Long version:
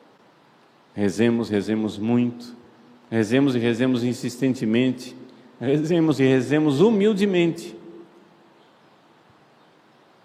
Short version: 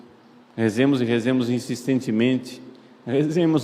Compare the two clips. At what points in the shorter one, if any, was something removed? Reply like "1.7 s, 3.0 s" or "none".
none